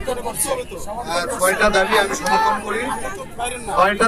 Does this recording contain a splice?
no; 0 cuts

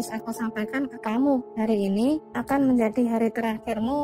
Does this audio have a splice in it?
no; 0 cuts

